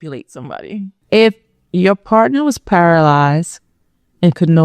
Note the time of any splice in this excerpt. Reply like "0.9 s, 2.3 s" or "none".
0.9 s